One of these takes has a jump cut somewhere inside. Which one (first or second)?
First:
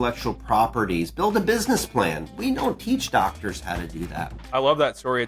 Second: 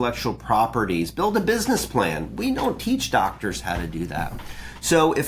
first